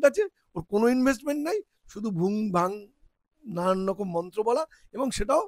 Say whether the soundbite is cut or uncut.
uncut